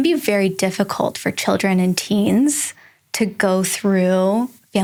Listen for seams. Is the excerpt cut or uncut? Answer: uncut